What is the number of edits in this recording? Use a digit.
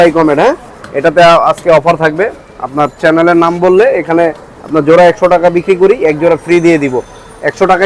0